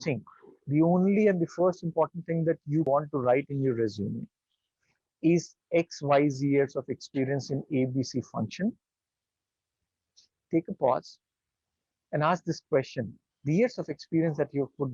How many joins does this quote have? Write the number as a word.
one